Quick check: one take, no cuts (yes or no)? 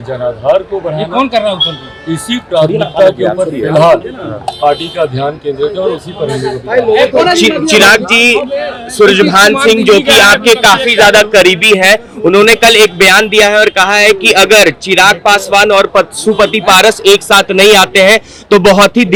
yes